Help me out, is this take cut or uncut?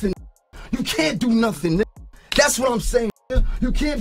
uncut